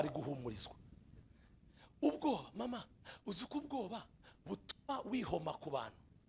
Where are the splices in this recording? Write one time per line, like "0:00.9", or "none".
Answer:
0:01.2